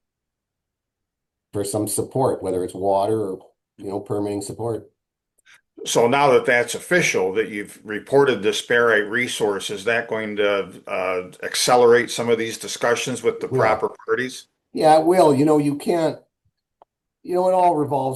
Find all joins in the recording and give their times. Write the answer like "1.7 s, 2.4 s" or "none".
none